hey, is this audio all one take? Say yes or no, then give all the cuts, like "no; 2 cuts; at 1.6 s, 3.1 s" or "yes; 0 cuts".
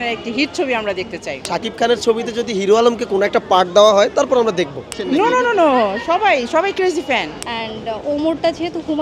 no; 3 cuts; at 1.4 s, 4.8 s, 7.4 s